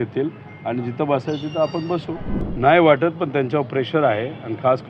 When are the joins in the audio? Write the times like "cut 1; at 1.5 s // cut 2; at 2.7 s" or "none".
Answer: cut 1; at 2.3 s